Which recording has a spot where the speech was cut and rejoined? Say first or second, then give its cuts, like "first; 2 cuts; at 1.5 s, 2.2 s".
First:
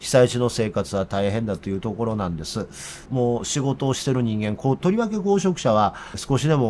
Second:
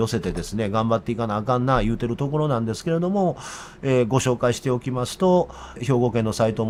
first; 1 cut; at 3.1 s